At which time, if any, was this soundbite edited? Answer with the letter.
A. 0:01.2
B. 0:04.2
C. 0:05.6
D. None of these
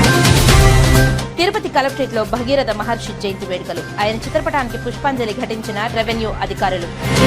A